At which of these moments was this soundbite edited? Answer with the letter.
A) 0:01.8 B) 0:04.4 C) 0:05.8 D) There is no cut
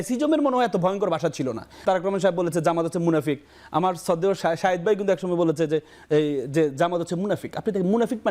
A